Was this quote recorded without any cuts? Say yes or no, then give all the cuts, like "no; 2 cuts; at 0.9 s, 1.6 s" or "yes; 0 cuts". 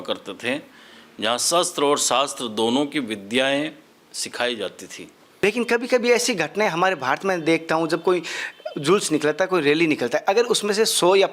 no; 1 cut; at 5.3 s